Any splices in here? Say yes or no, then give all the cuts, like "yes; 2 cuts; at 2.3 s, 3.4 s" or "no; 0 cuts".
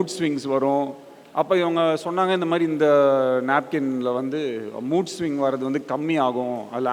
no; 0 cuts